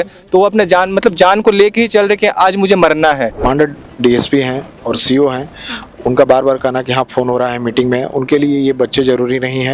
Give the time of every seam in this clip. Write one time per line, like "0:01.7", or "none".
0:03.3